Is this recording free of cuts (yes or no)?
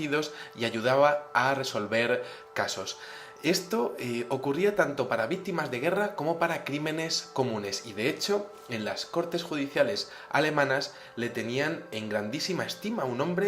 no